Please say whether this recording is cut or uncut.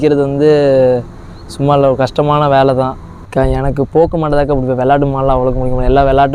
cut